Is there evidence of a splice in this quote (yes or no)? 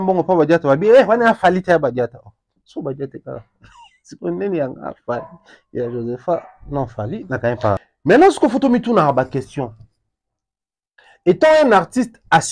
yes